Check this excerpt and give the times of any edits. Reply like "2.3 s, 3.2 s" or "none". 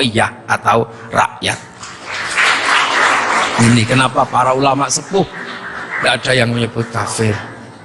none